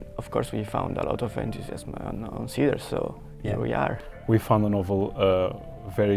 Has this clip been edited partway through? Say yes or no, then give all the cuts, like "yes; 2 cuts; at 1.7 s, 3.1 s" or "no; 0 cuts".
yes; 1 cut; at 4.0 s